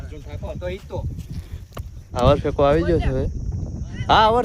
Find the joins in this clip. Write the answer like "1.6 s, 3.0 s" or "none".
2.2 s